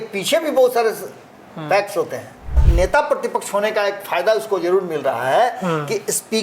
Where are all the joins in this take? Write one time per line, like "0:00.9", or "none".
0:02.6